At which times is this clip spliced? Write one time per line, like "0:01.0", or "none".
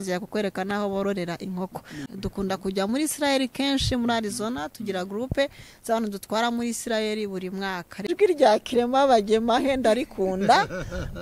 0:02.1
0:08.1